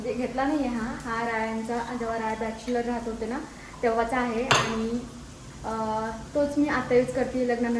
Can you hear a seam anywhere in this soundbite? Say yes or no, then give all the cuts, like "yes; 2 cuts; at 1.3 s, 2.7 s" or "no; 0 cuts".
no; 0 cuts